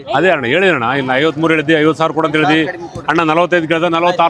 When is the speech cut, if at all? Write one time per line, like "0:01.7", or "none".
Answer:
none